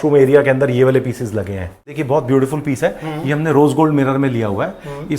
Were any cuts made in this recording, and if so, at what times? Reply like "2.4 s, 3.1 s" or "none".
1.9 s